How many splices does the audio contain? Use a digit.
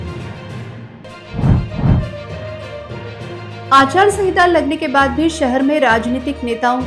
1